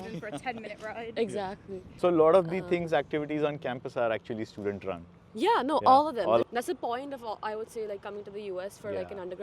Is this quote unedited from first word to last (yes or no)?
no